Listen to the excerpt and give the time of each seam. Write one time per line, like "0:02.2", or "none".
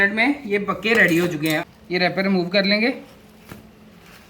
0:01.6